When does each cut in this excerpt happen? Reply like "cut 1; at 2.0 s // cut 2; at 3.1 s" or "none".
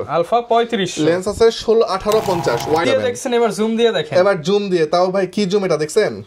cut 1; at 2.8 s

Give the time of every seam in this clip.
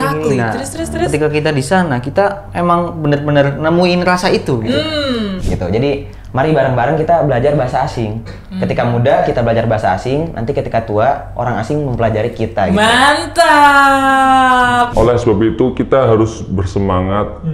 cut 1; at 5.3 s // cut 2; at 14.9 s

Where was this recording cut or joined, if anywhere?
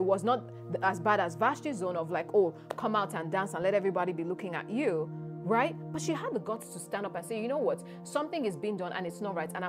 none

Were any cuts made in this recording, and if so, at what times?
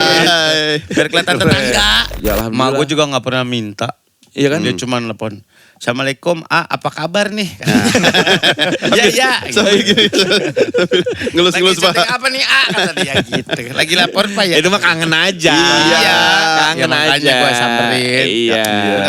cut 1; at 2.0 s

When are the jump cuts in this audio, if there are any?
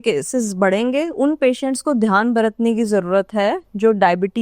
cut 1; at 1.1 s

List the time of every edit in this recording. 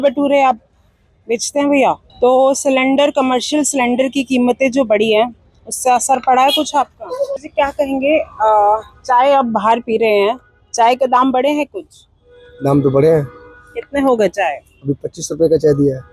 cut 1; at 2.1 s // cut 2; at 7.4 s

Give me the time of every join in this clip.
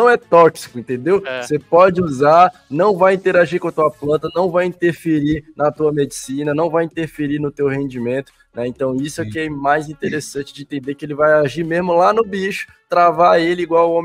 none

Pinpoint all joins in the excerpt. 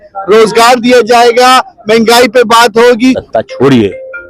cut 1; at 3.2 s

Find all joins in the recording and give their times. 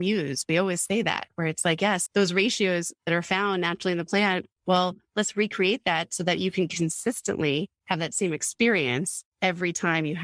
cut 1; at 2.0 s

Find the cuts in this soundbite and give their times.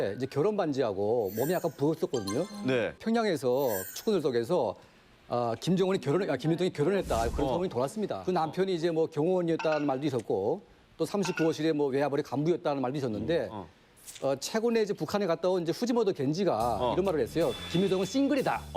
cut 1; at 3.0 s // cut 2; at 8.2 s

